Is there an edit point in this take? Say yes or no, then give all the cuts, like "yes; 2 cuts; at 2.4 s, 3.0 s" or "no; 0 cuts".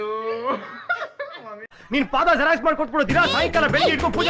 no; 0 cuts